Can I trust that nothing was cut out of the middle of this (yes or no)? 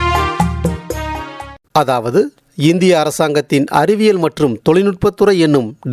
no